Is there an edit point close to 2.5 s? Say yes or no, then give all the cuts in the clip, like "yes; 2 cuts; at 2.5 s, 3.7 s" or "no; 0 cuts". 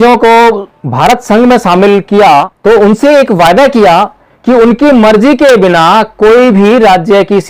yes; 1 cut; at 2.5 s